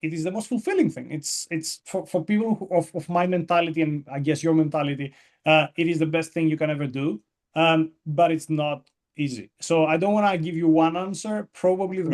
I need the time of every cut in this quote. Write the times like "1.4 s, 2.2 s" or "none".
none